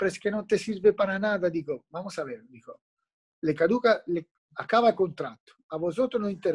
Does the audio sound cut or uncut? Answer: uncut